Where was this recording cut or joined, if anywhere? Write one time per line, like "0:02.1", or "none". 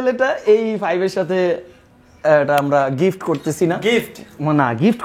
none